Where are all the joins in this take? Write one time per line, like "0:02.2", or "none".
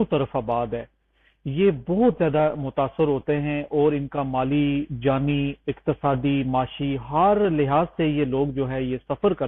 none